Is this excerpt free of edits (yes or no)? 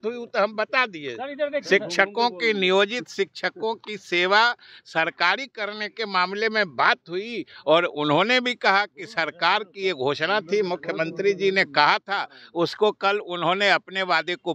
yes